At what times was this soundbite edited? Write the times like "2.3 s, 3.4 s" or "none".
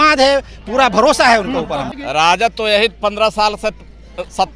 2.0 s